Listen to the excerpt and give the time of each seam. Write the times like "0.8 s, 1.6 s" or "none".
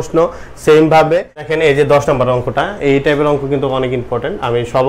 1.5 s